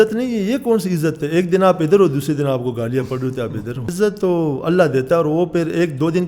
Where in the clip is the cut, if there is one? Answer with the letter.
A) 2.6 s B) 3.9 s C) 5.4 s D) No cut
B